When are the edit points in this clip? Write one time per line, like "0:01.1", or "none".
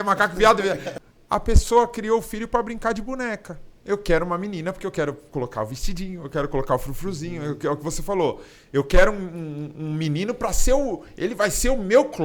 0:01.0